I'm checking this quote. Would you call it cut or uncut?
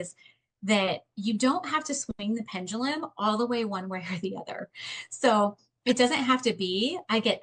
uncut